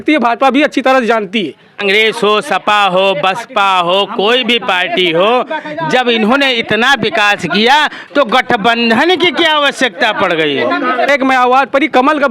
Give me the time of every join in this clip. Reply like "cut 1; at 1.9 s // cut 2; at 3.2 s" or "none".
cut 1; at 1.7 s // cut 2; at 11.1 s

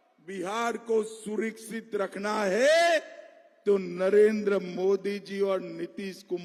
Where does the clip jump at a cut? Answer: none

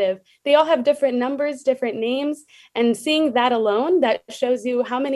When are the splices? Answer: none

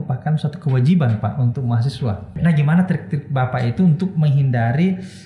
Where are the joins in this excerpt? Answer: cut 1; at 2.3 s

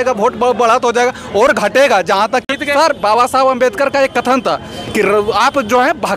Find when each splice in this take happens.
cut 1; at 2.5 s

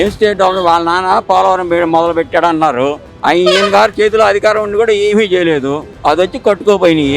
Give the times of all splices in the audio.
cut 1; at 3.1 s // cut 2; at 5.8 s

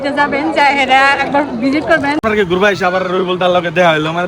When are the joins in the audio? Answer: cut 1; at 2.2 s

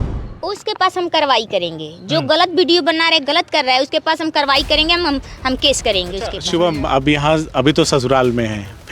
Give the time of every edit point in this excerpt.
cut 1; at 6.4 s

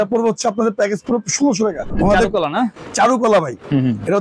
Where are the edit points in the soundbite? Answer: cut 1; at 1.9 s // cut 2; at 2.8 s

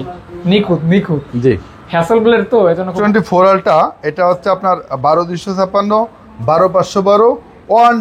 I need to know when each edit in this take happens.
cut 1; at 2.9 s

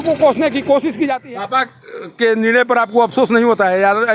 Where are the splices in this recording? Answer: cut 1; at 1.2 s

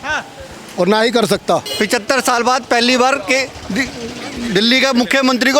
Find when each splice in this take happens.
cut 1; at 1.7 s

